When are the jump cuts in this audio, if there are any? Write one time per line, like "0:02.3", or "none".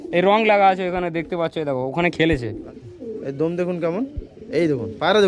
0:02.6